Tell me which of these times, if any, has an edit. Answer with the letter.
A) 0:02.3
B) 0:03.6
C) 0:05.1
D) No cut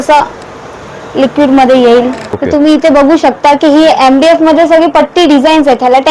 A